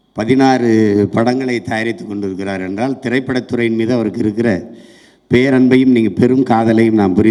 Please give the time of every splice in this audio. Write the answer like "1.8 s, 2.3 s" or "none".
none

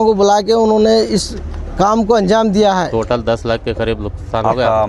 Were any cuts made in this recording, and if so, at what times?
2.9 s

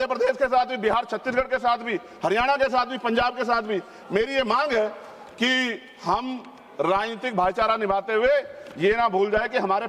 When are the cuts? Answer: none

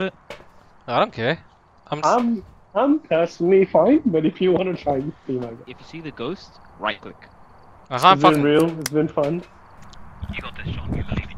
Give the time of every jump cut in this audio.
none

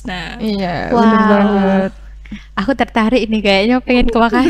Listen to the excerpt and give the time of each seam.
none

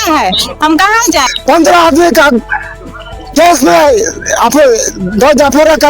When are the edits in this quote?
1.3 s

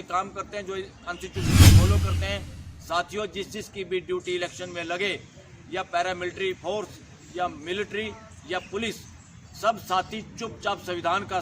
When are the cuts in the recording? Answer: 1.4 s, 2.4 s

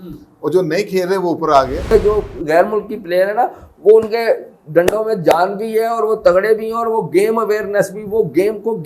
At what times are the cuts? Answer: 1.9 s

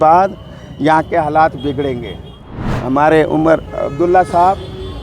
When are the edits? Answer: 2.6 s

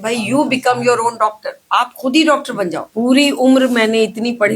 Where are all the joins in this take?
2.8 s

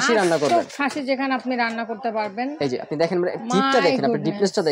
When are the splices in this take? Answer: none

